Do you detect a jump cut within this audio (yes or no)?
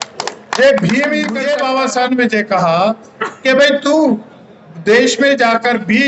yes